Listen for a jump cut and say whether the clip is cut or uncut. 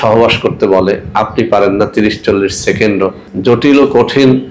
cut